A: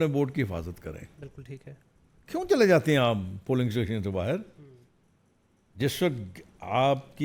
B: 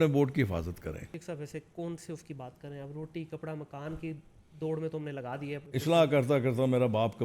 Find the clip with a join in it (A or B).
B